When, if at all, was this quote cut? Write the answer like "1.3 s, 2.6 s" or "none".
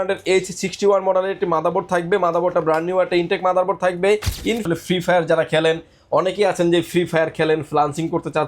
4.6 s